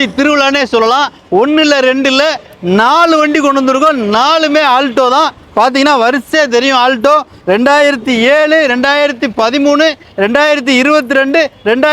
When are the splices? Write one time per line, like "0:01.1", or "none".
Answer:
none